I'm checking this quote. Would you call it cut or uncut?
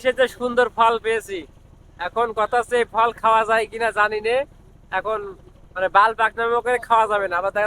uncut